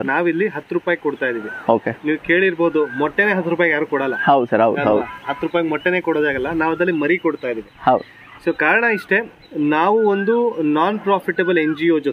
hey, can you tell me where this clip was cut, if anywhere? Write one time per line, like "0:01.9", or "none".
none

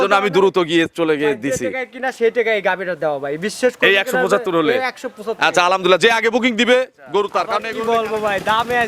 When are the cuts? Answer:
0:07.7

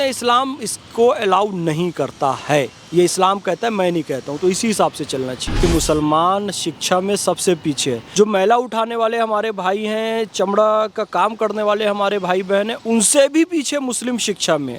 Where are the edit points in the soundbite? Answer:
0:05.6
0:08.0

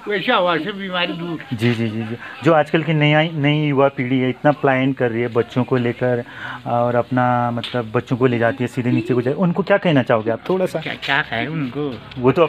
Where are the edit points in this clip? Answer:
none

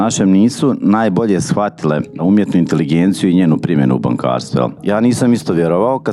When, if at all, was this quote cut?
0:02.2
0:04.8

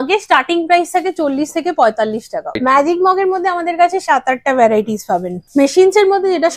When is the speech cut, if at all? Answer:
0:02.6
0:05.4

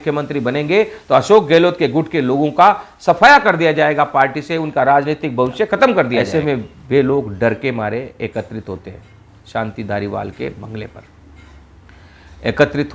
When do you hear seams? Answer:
0:06.3

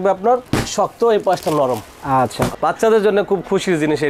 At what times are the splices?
0:02.5

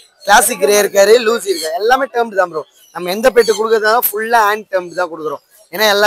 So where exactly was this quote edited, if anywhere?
none

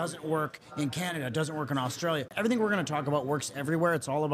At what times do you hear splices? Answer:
0:02.3

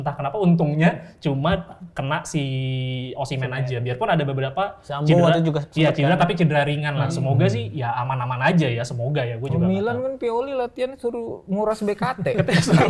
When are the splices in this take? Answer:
none

